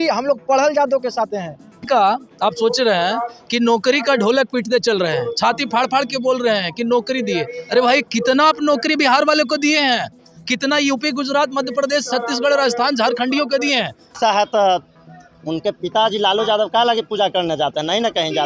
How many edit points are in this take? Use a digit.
2